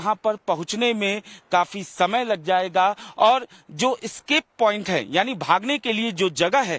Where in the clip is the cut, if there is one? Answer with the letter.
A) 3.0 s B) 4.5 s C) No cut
A